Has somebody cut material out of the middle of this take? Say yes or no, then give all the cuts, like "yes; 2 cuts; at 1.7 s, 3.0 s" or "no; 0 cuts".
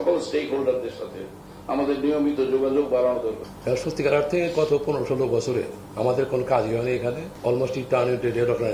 yes; 3 cuts; at 3.5 s, 5.8 s, 7.3 s